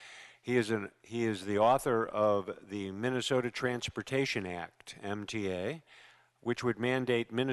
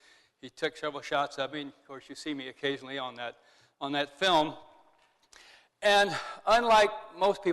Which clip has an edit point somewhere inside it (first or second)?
second